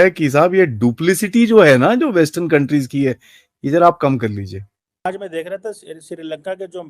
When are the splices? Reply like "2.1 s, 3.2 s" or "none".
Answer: 5.1 s